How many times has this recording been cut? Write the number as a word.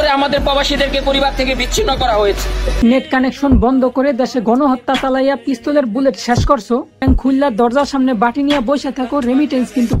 two